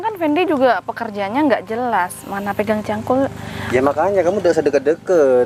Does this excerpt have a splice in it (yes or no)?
no